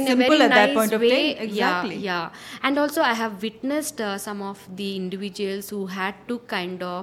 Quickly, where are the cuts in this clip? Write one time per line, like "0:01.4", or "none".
none